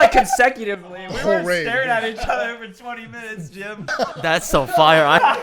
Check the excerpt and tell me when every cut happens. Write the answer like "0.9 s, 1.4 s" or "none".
3.9 s